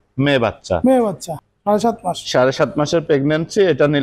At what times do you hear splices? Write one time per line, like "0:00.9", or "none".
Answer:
0:01.3